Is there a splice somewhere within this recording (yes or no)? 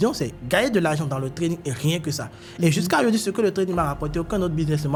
no